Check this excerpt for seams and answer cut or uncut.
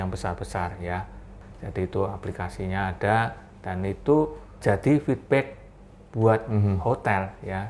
cut